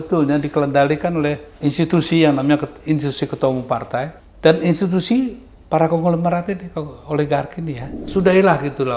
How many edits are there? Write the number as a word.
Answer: three